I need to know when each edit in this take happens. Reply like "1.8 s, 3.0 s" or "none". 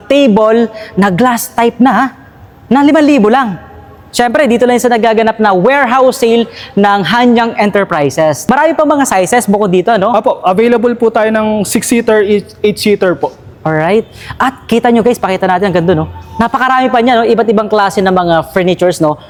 none